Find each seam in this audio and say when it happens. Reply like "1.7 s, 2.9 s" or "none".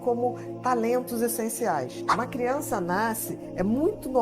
2.0 s